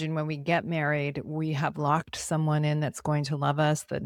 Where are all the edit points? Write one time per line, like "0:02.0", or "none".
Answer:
none